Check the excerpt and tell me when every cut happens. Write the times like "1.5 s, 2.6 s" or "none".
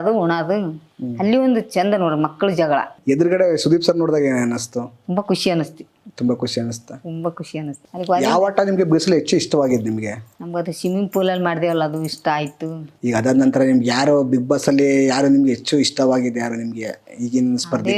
2.9 s, 7.8 s, 12.8 s